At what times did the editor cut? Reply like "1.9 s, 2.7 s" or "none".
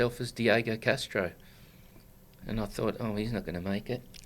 none